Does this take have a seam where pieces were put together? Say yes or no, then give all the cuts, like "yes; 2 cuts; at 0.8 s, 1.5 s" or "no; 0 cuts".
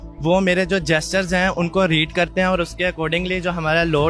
no; 0 cuts